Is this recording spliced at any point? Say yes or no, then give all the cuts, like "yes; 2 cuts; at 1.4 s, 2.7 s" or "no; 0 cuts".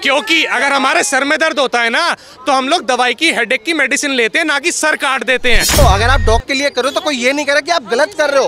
yes; 1 cut; at 5.8 s